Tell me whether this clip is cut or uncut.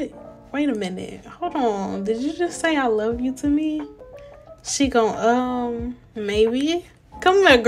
uncut